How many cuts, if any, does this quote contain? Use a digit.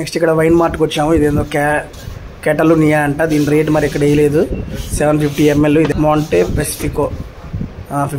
1